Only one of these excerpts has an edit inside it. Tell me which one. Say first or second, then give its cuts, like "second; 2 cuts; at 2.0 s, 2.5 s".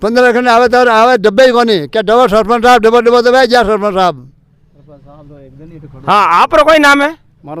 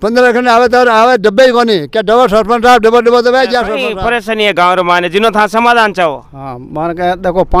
second; 1 cut; at 3.9 s